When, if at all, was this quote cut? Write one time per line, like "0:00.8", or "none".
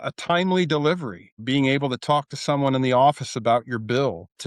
none